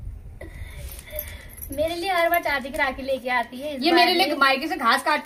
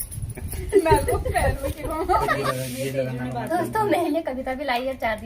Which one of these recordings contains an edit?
second; 1 cut; at 2.3 s

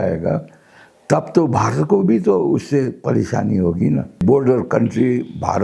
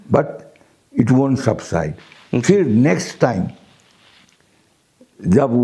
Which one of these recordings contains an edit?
first; 1 cut; at 4.2 s

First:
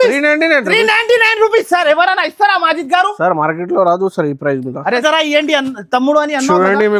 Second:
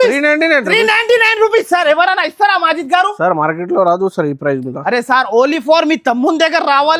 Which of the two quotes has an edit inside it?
first; 1 cut; at 5.0 s

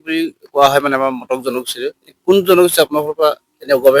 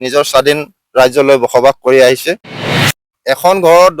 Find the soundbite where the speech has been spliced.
second; 1 cut; at 2.9 s

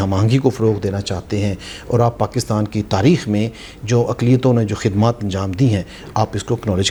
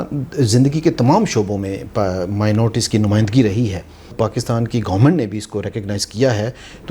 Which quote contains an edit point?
second; 1 cut; at 4.1 s

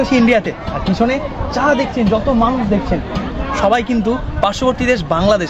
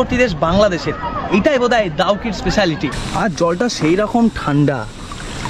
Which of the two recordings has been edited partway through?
second; 1 cut; at 3.0 s

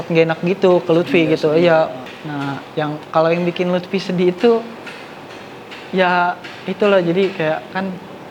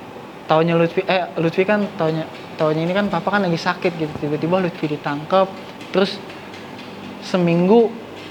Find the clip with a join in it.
first; 1 cut; at 2.0 s

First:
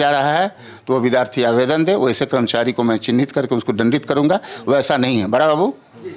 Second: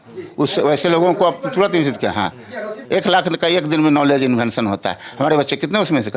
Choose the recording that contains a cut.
second; 1 cut; at 2.8 s

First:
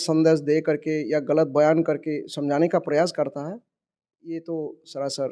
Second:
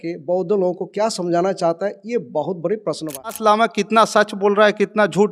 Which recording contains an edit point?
second; 1 cut; at 3.4 s

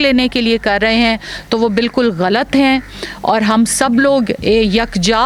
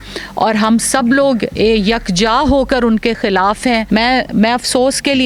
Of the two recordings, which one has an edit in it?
second; 1 cut; at 3.8 s

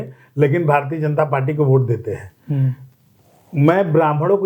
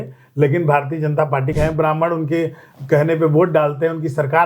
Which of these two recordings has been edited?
second; 1 cut; at 1.5 s

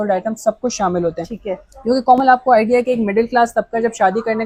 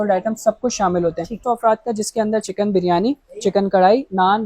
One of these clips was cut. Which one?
second; 1 cut; at 1.4 s

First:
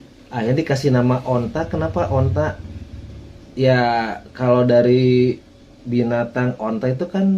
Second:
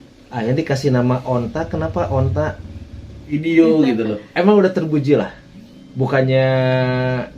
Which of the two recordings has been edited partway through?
second; 1 cut; at 3.3 s

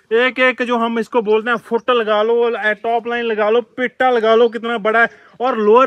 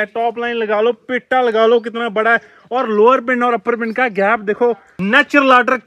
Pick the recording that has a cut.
second; 1 cut; at 4.9 s

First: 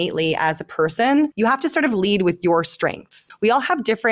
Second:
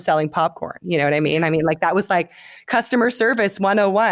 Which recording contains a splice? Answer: first; 2 cuts; at 1.3 s, 3.2 s

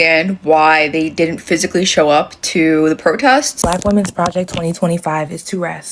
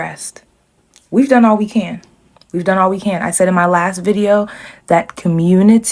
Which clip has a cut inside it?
first; 1 cut; at 3.5 s

